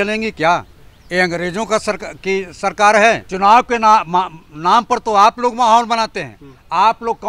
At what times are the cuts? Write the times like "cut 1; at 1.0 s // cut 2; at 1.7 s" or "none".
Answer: cut 1; at 3.3 s